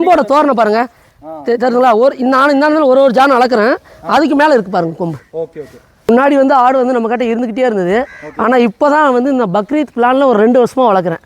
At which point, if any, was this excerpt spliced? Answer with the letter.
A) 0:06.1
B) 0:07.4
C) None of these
A